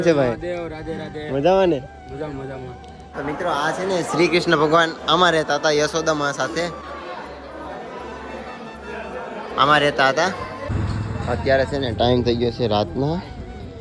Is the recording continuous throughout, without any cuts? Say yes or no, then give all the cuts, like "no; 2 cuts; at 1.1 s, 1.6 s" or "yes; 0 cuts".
no; 3 cuts; at 3.1 s, 6.9 s, 10.7 s